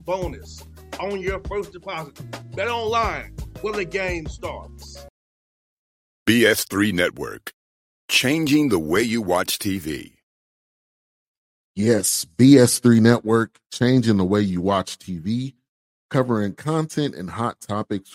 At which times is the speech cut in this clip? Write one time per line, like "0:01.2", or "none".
0:05.1